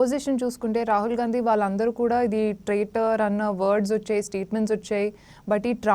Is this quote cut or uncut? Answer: uncut